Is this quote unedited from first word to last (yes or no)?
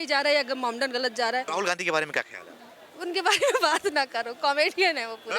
no